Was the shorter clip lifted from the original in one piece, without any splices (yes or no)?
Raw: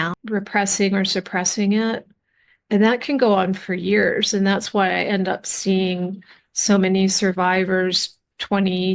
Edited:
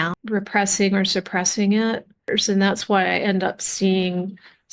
no